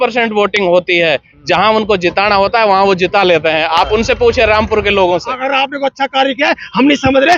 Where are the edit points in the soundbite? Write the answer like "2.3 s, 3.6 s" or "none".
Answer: 5.3 s